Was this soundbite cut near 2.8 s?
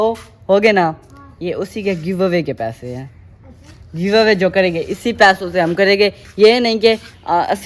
no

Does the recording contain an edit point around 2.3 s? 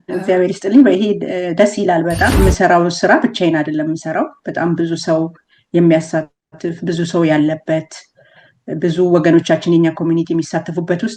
yes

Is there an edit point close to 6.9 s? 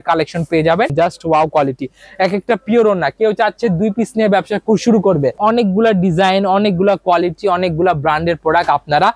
no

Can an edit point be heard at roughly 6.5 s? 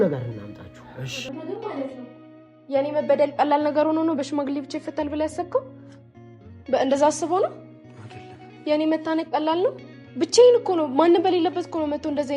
no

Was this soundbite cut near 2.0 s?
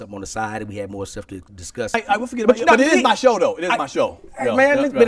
yes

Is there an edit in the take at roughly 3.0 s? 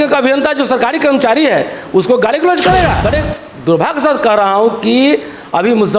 yes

